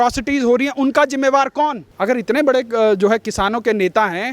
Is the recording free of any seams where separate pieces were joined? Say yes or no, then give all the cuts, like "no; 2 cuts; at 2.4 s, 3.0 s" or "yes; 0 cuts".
no; 1 cut; at 1.9 s